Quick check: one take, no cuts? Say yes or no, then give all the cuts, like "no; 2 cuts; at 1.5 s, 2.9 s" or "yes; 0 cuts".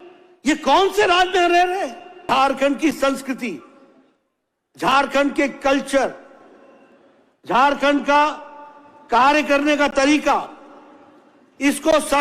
no; 1 cut; at 2.2 s